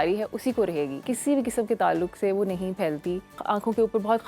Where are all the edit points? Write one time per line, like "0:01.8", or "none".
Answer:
0:01.0
0:03.4

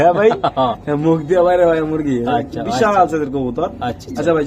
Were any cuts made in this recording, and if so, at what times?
none

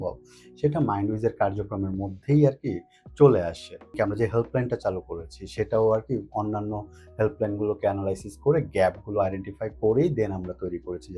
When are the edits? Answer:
0:03.9

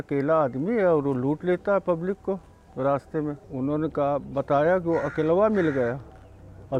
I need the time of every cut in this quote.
0:03.4

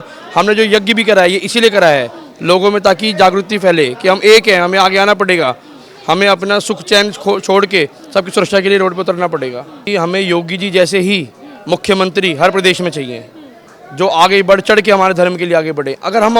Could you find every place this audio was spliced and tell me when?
0:09.9

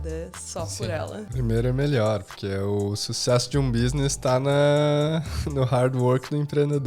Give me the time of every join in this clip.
0:01.3

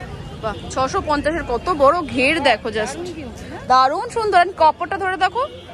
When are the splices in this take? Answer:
none

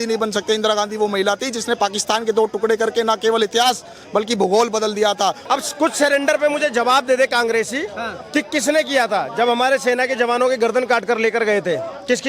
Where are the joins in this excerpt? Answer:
0:05.4

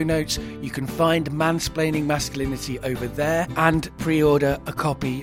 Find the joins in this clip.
0:03.7

